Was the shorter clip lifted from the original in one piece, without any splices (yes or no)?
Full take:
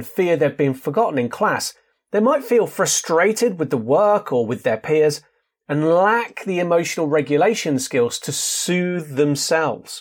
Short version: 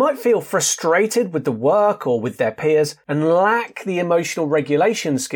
no